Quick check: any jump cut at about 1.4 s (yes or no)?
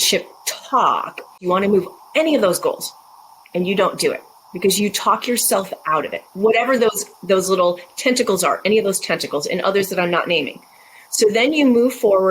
yes